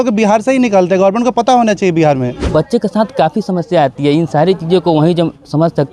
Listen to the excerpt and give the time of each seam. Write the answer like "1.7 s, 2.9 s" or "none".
2.4 s